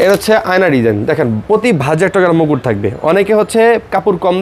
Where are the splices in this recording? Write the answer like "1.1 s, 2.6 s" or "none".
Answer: none